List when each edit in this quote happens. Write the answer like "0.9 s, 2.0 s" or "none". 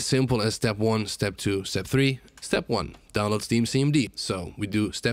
2.3 s, 4.2 s